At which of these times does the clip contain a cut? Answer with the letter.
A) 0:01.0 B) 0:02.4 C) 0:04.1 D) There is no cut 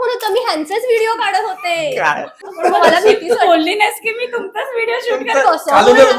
B